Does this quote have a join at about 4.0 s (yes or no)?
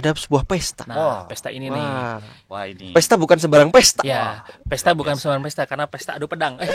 no